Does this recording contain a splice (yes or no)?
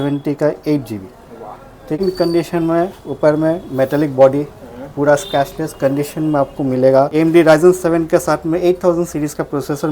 yes